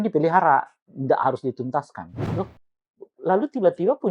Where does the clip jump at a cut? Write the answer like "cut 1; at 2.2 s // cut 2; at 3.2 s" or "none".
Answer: cut 1; at 2.2 s

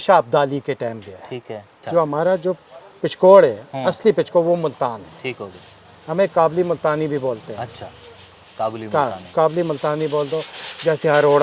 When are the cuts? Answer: cut 1; at 1.8 s

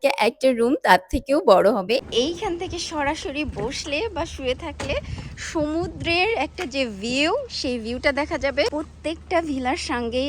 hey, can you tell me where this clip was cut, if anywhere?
cut 1; at 2.0 s // cut 2; at 8.7 s

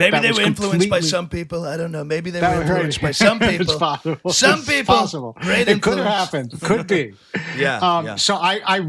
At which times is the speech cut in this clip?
none

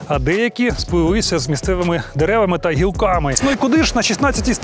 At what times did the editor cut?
cut 1; at 3.4 s

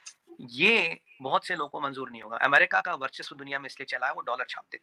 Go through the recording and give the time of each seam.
none

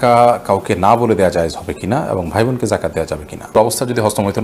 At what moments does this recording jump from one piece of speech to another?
cut 1; at 3.5 s

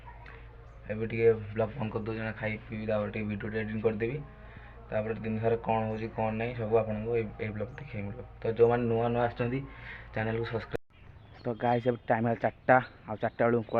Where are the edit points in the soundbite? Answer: cut 1; at 10.7 s

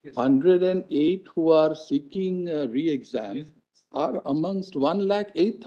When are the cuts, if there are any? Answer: none

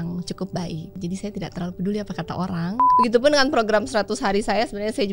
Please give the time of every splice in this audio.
cut 1; at 1.0 s // cut 2; at 2.9 s

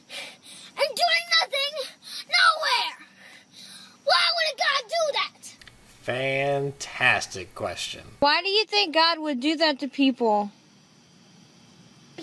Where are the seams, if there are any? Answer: cut 1; at 6.6 s

